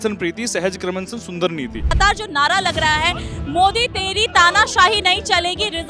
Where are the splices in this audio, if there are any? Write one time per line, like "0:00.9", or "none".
0:02.0